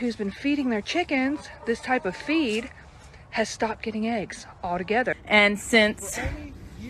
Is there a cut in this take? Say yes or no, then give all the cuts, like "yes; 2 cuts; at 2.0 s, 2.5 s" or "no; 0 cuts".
yes; 1 cut; at 5.2 s